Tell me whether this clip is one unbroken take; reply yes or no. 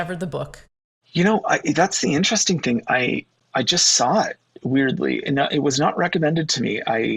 yes